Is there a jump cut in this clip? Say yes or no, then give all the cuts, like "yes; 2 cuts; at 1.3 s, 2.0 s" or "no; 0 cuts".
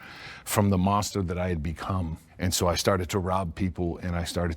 yes; 1 cut; at 2.2 s